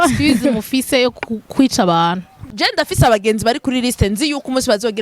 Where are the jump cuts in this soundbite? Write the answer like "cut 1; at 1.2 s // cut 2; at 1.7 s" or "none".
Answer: cut 1; at 2.5 s